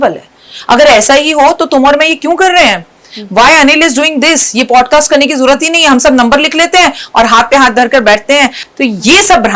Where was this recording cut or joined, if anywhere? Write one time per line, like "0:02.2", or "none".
0:08.6